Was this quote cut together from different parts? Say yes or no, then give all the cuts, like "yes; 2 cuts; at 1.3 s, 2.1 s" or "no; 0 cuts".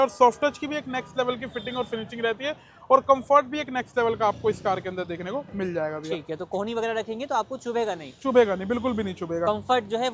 no; 0 cuts